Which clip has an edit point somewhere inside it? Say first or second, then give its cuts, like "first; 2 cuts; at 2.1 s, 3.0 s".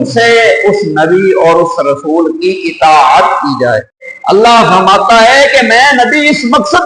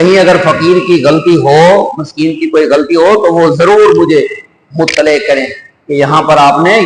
first; 1 cut; at 4.1 s